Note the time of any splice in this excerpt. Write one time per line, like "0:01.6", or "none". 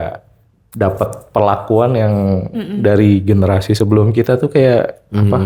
none